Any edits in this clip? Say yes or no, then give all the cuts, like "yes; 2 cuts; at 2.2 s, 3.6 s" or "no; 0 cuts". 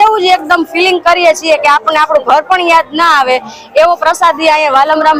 no; 0 cuts